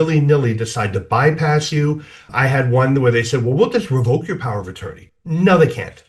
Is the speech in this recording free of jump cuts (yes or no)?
no